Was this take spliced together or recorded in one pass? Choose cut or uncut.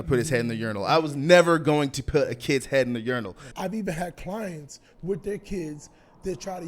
cut